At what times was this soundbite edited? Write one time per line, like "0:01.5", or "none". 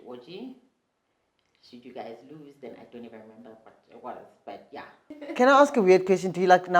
0:05.1